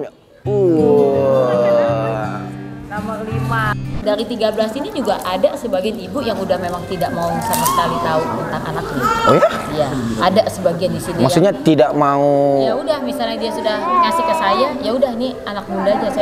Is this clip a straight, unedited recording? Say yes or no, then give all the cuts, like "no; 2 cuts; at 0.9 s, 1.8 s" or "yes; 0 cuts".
no; 1 cut; at 3.9 s